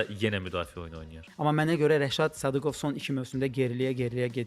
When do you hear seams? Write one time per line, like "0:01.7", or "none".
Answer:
0:01.2